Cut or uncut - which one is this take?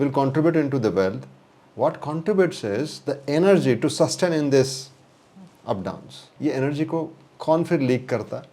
cut